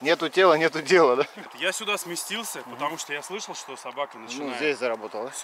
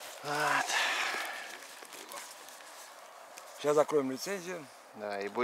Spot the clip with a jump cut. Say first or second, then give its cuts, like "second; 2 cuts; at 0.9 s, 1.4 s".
first; 1 cut; at 1.5 s